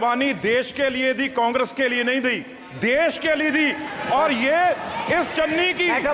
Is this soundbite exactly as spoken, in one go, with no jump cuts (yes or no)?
yes